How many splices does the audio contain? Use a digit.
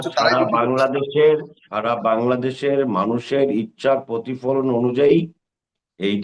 0